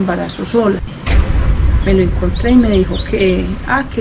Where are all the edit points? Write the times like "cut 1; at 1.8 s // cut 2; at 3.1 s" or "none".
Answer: cut 1; at 0.9 s